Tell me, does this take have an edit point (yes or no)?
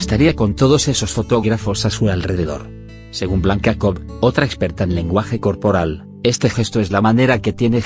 yes